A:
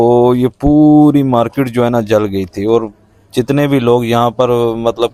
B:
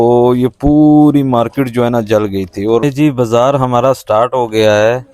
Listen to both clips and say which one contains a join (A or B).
B